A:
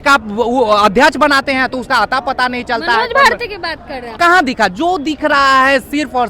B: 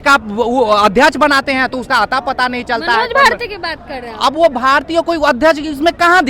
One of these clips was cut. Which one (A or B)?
A